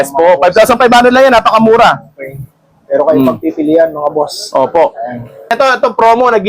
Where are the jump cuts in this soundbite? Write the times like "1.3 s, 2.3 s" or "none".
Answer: 5.5 s